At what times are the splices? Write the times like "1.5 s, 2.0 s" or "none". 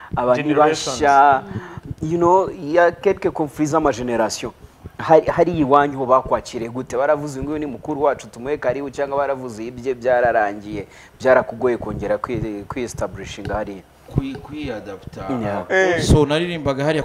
15.6 s